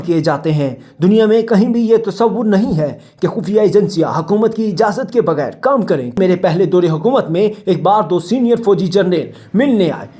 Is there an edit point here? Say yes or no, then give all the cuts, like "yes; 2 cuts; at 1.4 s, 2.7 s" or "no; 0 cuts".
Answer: yes; 1 cut; at 6.2 s